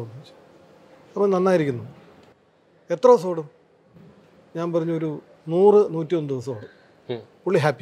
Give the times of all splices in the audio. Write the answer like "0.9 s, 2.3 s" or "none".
none